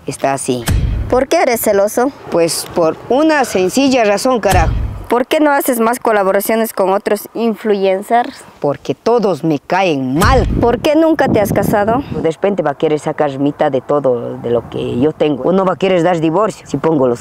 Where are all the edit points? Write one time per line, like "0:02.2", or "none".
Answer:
0:01.1
0:04.6
0:08.4
0:10.5
0:12.2
0:15.4

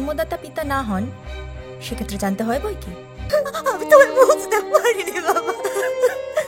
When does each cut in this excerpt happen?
0:03.2

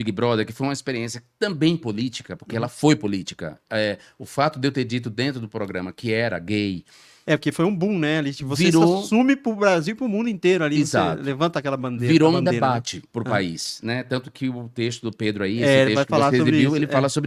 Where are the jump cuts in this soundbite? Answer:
none

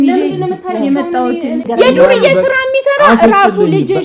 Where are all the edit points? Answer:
0:01.7

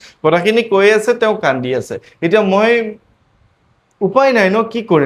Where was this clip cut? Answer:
none

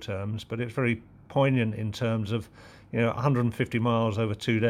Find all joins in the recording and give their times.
none

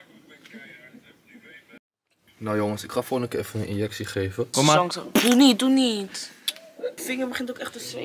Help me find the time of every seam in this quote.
0:01.8
0:04.5
0:07.0

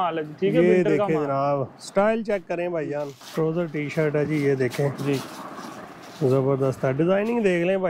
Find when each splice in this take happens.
0:03.2
0:05.7

